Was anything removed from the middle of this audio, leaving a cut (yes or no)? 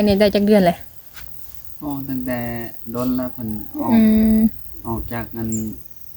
no